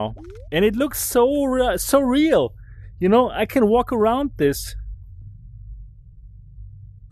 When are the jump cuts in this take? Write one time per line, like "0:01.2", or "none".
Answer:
none